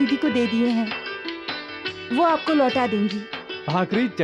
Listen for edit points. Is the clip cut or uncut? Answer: uncut